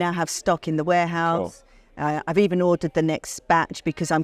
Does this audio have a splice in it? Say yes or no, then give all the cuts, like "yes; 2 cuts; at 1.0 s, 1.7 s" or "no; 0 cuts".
no; 0 cuts